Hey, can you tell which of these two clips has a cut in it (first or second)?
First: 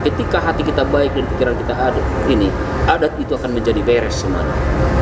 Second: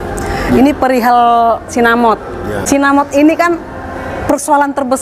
second